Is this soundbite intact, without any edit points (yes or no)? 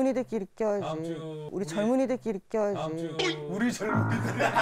yes